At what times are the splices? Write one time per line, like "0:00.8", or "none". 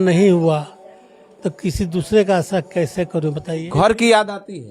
0:03.6